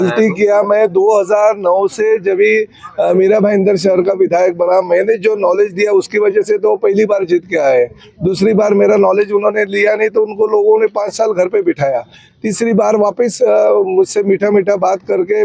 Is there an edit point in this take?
no; 0 cuts

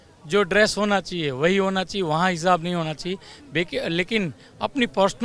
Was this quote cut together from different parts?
no; 0 cuts

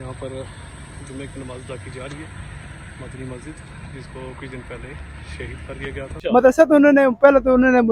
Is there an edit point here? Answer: yes; 1 cut; at 6.1 s

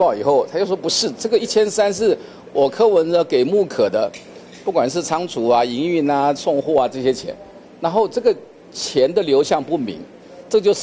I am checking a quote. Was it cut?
no; 0 cuts

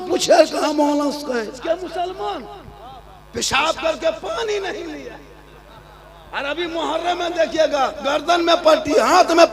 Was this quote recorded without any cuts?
no; 1 cut; at 1.6 s

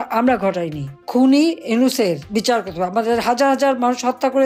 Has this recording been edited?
yes; 1 cut; at 1.0 s

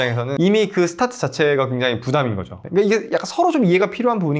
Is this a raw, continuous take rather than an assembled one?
yes; 0 cuts

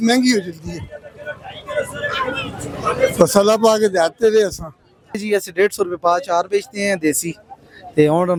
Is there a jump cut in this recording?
no; 0 cuts

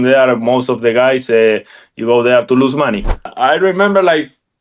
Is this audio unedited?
no; 1 cut; at 3.3 s

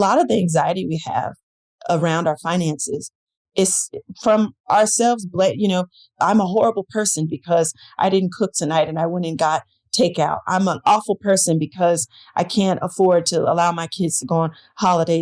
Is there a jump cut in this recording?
yes; 1 cut; at 6.0 s

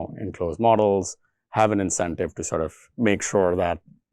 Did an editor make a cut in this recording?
yes; 1 cut; at 2.8 s

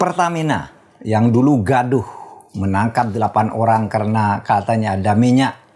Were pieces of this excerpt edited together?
no; 0 cuts

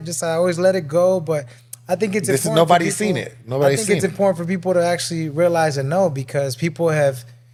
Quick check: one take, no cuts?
yes; 0 cuts

